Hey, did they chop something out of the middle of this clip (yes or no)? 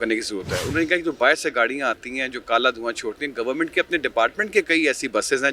no